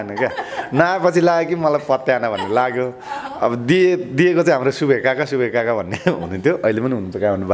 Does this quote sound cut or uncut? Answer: uncut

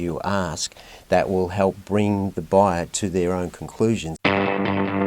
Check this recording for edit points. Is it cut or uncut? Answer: cut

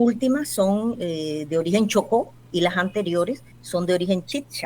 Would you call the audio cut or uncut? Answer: cut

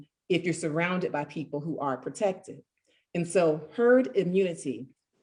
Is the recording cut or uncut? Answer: uncut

